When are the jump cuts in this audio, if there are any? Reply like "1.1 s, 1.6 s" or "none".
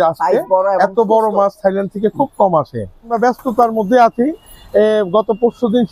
3.1 s